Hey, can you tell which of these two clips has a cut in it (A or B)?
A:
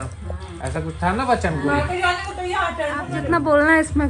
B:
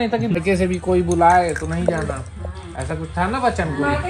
A